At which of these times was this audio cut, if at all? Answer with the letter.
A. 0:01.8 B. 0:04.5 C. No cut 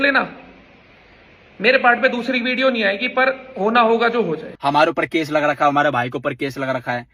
B